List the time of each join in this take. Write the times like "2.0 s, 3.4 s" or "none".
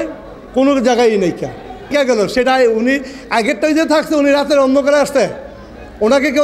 1.9 s